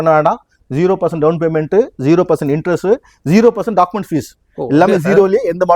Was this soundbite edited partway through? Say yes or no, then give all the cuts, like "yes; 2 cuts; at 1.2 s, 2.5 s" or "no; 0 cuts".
no; 0 cuts